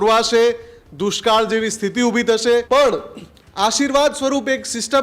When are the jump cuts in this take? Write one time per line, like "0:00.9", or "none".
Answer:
0:02.7